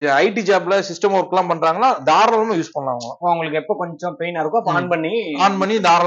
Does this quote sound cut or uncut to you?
uncut